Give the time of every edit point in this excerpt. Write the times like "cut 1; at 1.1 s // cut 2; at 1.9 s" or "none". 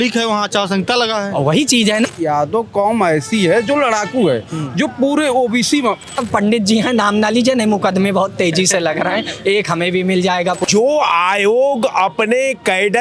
cut 1; at 2.1 s // cut 2; at 6.2 s // cut 3; at 10.6 s